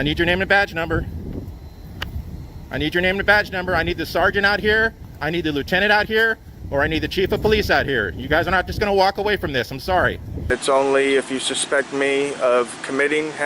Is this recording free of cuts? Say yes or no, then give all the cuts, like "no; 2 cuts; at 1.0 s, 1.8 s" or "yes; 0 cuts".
no; 1 cut; at 10.5 s